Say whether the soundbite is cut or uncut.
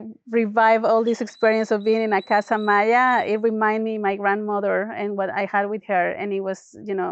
uncut